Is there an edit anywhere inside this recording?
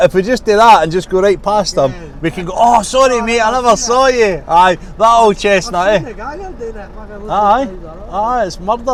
no; 0 cuts

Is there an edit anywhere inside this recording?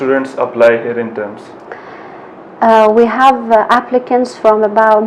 no; 0 cuts

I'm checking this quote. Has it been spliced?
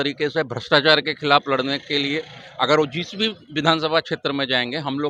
no; 0 cuts

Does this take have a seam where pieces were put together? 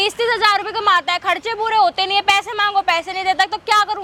no; 0 cuts

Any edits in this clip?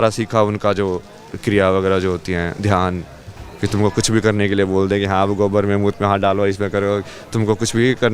yes; 1 cut; at 3.4 s

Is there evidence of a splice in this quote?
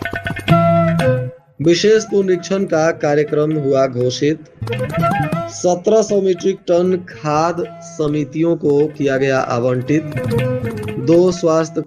yes; 1 cut; at 1.5 s

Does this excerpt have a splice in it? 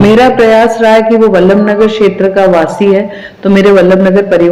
no; 0 cuts

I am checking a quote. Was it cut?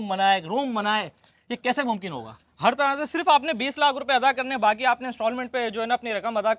no; 0 cuts

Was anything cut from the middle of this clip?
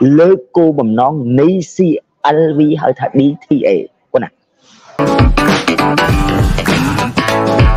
yes; 1 cut; at 5.0 s

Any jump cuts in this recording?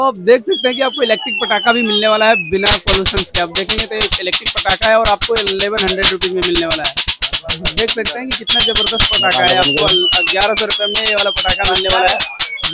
no; 0 cuts

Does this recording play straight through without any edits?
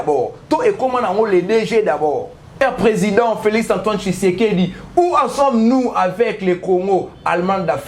no; 1 cut; at 2.5 s

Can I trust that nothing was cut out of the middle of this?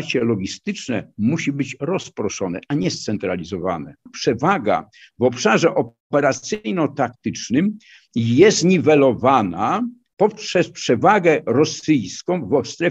no; 1 cut; at 4.1 s

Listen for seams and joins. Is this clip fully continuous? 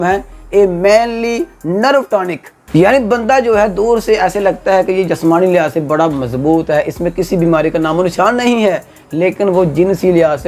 yes; 0 cuts

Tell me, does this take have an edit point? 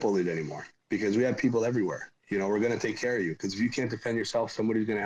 no; 0 cuts

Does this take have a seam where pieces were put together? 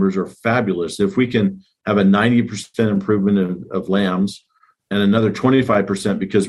no; 0 cuts

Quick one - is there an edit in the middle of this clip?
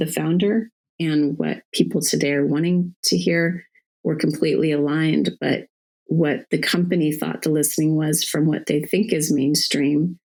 no; 0 cuts

